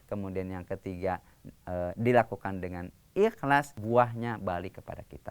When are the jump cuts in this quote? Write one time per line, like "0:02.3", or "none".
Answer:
0:03.8

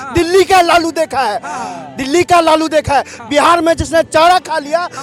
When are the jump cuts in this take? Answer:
none

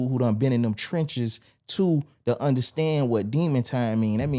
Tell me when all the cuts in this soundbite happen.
none

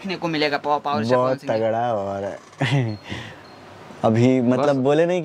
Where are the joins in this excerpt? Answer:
none

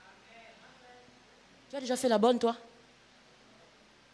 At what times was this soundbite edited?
0:01.8

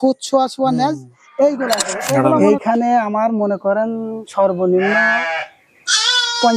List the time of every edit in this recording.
0:02.3

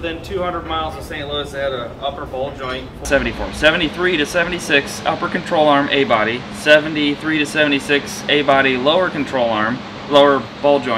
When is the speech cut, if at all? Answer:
0:03.0

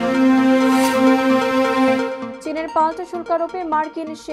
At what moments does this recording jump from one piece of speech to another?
0:02.2

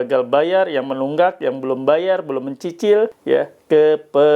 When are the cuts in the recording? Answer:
0:03.2

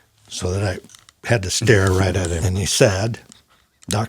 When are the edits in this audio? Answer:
0:02.4

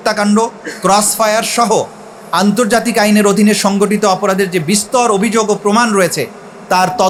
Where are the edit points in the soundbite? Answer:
none

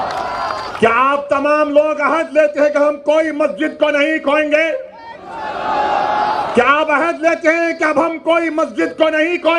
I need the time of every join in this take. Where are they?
none

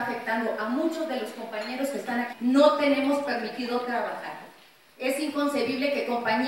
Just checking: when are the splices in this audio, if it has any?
none

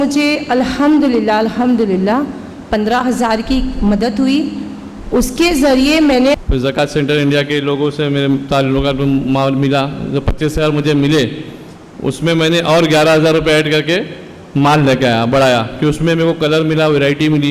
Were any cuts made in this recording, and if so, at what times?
0:06.4

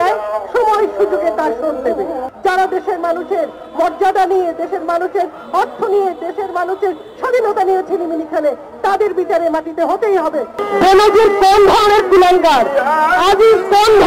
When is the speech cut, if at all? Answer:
0:02.3
0:10.7

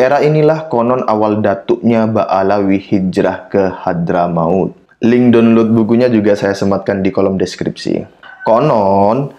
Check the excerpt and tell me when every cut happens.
0:04.8
0:08.2

